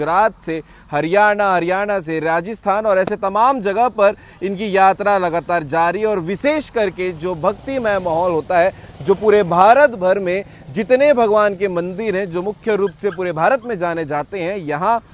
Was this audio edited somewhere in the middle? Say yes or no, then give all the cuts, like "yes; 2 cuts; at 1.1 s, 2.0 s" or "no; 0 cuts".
no; 0 cuts